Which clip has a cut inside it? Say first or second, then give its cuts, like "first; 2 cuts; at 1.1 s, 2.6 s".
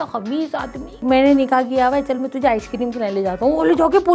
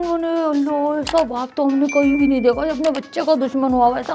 first; 2 cuts; at 1.0 s, 3.4 s